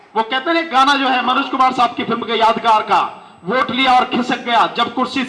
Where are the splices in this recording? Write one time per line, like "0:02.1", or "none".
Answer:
none